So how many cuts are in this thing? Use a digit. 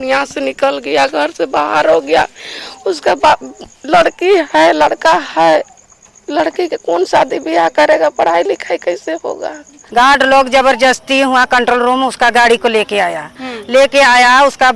1